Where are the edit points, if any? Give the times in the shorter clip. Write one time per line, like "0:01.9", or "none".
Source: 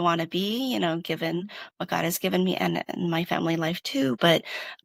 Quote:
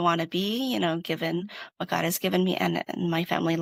none

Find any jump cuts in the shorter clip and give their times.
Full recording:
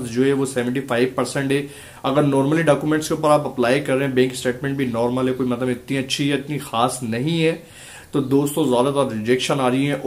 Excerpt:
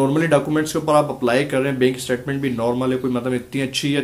none

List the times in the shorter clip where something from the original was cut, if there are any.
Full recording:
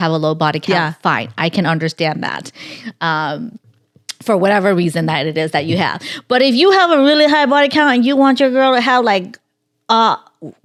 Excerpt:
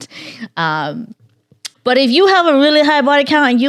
0:01.6

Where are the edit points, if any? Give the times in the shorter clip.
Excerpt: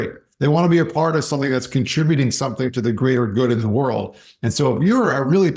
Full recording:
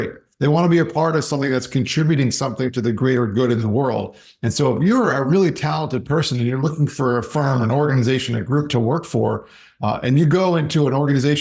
none

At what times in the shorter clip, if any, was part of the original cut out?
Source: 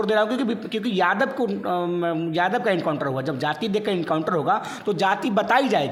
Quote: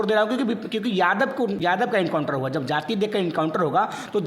0:01.6

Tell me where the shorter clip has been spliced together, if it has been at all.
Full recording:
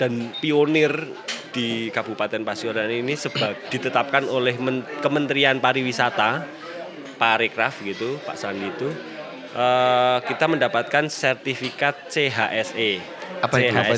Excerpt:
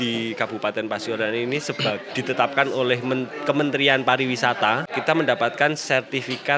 0:05.0

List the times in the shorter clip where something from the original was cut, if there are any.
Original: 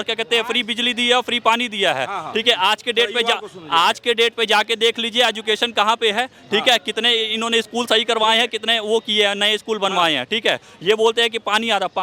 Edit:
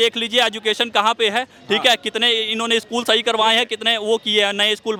none

